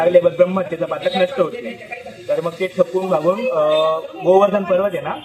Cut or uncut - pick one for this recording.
uncut